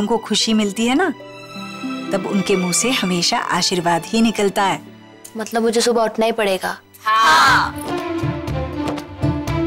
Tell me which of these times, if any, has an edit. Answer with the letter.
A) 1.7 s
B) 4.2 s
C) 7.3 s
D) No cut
D